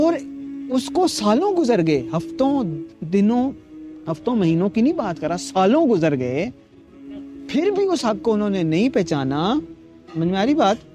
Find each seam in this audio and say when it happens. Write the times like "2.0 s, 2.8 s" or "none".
none